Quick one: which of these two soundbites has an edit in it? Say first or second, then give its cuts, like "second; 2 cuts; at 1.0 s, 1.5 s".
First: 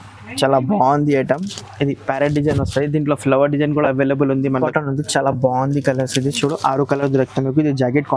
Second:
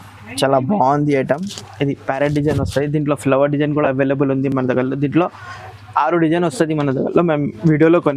first; 1 cut; at 4.6 s